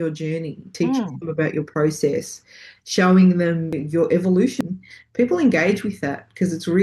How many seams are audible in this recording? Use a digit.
1